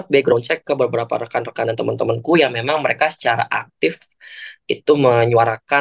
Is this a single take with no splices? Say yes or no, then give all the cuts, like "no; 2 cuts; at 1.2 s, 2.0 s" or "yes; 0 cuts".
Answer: yes; 0 cuts